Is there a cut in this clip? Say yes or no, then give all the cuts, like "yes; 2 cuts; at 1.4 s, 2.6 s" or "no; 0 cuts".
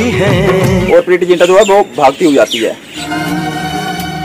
yes; 2 cuts; at 0.8 s, 2.9 s